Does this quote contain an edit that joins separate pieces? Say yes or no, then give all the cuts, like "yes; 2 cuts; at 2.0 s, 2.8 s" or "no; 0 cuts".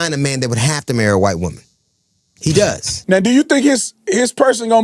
no; 0 cuts